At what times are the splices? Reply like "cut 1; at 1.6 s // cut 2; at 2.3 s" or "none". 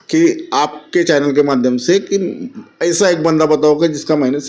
none